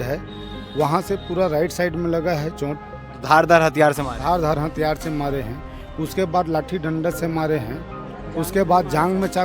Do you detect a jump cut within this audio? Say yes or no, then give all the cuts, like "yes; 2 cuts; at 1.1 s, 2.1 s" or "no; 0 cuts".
no; 0 cuts